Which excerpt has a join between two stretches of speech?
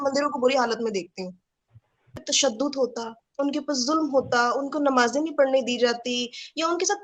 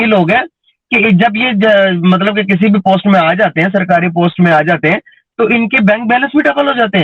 first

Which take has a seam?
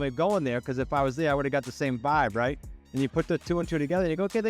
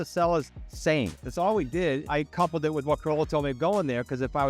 second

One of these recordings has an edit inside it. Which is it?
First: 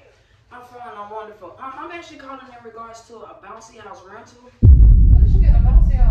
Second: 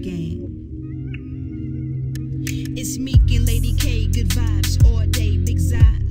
first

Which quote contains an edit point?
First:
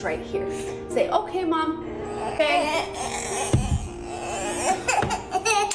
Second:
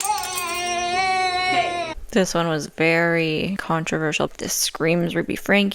second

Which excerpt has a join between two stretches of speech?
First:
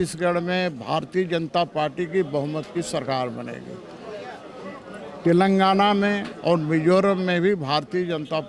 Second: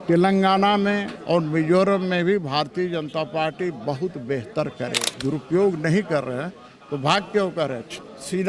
second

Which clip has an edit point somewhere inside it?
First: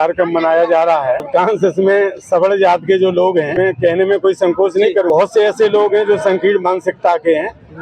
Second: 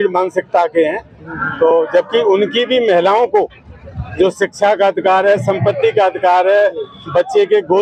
first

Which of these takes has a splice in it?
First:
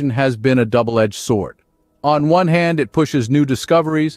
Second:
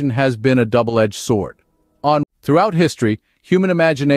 second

